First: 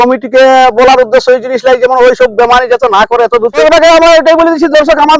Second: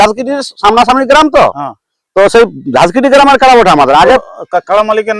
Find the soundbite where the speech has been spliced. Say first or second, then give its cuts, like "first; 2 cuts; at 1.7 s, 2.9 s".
first; 1 cut; at 3.6 s